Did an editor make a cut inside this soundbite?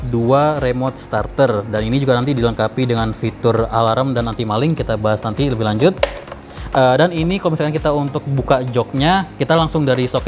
no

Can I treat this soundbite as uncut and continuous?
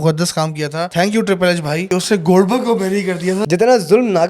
no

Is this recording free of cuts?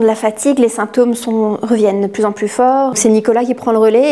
no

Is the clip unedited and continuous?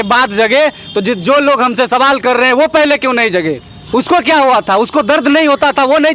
no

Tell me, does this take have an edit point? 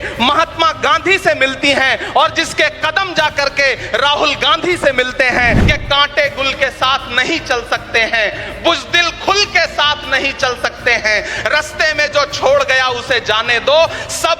yes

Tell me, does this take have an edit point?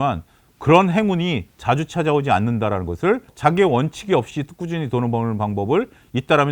yes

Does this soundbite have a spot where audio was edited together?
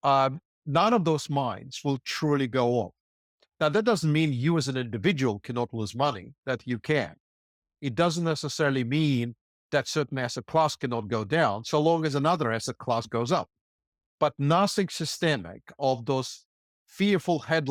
no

